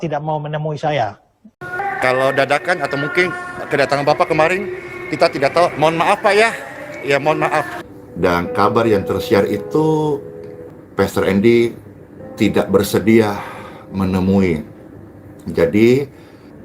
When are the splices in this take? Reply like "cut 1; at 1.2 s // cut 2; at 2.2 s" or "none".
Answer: cut 1; at 1.6 s // cut 2; at 7.8 s